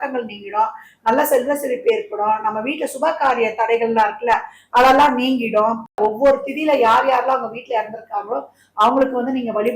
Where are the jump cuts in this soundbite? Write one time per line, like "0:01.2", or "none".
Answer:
0:06.0